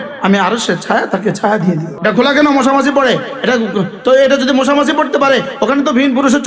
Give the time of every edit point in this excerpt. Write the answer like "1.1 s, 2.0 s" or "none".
1.9 s